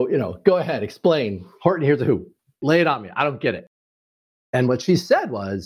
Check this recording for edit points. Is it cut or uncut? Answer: cut